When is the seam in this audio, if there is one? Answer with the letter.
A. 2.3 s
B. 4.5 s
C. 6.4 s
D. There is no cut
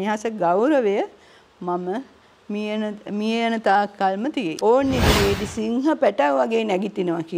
B